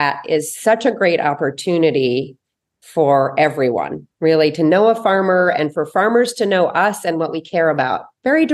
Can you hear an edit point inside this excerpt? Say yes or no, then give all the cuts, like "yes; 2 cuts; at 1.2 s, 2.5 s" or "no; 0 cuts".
no; 0 cuts